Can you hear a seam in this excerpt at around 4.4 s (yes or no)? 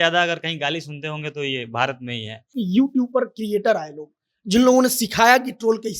no